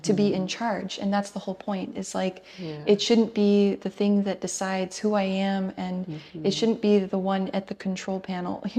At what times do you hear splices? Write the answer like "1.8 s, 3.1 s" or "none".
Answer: none